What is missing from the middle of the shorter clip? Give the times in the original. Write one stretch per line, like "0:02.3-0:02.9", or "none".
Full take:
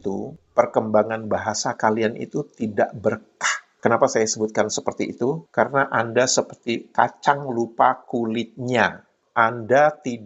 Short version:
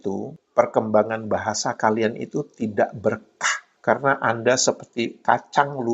0:03.7-0:05.4